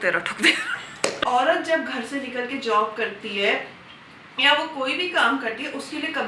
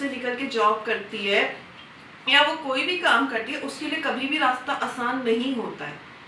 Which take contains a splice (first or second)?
first